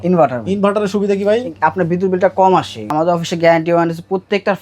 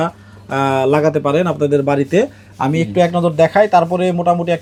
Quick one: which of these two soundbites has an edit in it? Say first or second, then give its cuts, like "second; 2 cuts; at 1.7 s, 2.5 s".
first; 1 cut; at 2.8 s